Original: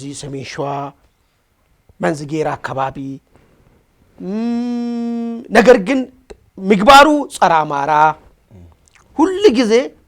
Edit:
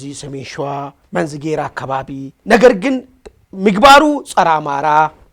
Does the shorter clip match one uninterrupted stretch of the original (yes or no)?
no